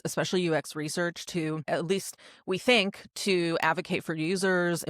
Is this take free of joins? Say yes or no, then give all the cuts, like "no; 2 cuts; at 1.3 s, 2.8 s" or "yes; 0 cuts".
no; 1 cut; at 1.7 s